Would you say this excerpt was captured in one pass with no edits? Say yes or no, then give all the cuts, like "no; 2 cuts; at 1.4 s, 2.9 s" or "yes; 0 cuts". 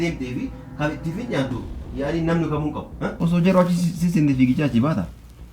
no; 1 cut; at 3.1 s